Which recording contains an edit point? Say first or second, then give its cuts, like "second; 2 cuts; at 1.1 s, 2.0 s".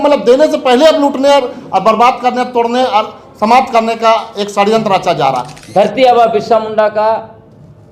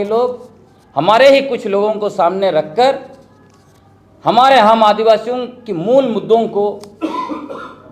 first; 1 cut; at 5.5 s